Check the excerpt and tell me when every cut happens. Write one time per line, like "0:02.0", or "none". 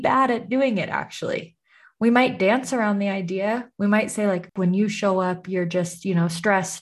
0:04.5